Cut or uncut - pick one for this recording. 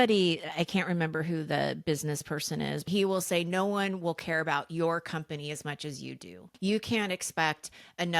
cut